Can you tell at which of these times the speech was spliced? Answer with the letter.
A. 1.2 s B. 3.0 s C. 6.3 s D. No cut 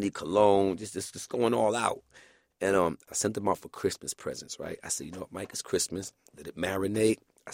B